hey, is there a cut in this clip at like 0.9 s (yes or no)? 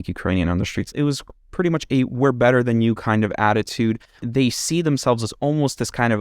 yes